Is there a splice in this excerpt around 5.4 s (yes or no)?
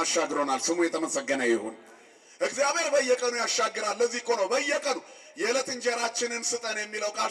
no